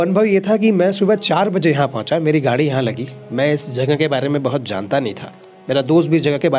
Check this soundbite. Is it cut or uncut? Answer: uncut